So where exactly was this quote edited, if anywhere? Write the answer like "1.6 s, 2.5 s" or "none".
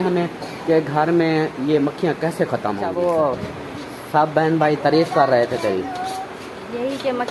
2.9 s